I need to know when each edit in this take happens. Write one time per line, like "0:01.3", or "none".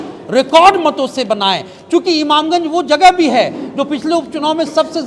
none